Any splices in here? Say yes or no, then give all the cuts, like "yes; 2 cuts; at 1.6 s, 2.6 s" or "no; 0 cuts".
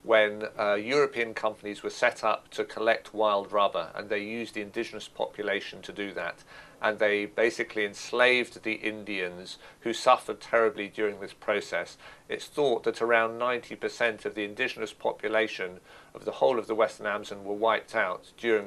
no; 0 cuts